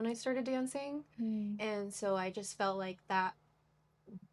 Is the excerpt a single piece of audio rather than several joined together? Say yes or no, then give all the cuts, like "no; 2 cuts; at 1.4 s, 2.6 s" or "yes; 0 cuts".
yes; 0 cuts